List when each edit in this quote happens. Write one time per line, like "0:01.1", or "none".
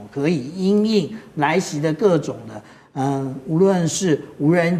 none